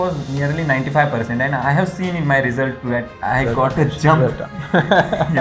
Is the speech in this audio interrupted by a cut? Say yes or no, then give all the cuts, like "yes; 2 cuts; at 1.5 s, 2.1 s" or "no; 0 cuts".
no; 0 cuts